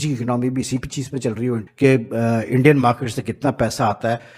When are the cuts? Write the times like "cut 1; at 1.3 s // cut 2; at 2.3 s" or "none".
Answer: cut 1; at 1.7 s

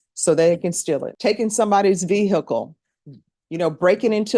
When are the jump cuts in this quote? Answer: cut 1; at 1.1 s

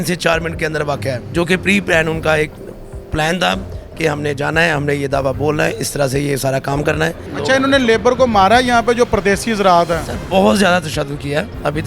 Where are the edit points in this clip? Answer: cut 1; at 1.2 s // cut 2; at 7.3 s

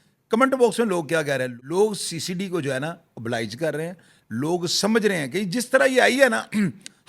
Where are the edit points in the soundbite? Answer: cut 1; at 1.5 s

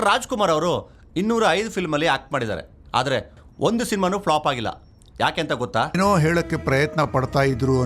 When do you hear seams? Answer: cut 1; at 6.0 s

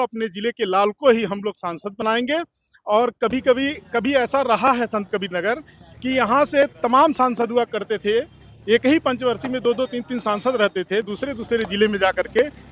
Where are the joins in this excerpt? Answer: none

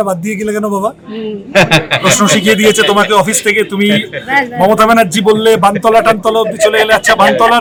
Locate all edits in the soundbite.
none

